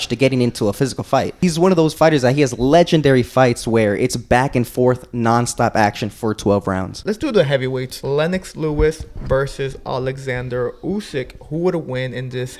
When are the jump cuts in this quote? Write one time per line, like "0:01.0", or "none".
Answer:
0:01.4
0:07.1
0:07.9